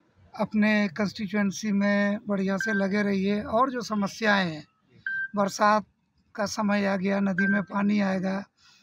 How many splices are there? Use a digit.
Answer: 0